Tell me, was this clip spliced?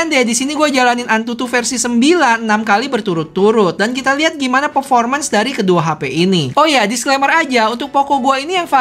no; 0 cuts

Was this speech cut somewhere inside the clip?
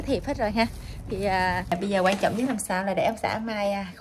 yes; 1 cut; at 1.7 s

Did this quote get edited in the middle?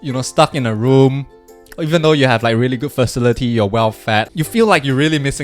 yes; 1 cut; at 4.3 s

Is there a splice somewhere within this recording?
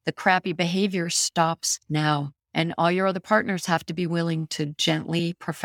no; 0 cuts

